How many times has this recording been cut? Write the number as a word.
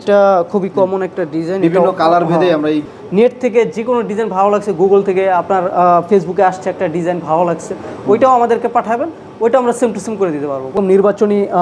two